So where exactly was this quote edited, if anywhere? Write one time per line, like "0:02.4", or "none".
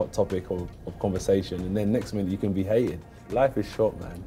0:03.1